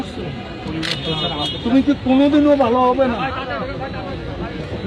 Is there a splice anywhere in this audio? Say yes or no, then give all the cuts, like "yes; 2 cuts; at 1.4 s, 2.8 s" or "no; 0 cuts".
no; 0 cuts